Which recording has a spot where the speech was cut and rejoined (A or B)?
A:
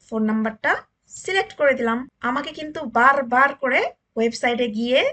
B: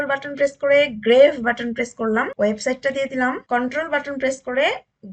B